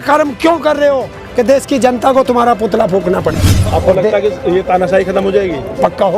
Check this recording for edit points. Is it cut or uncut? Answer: cut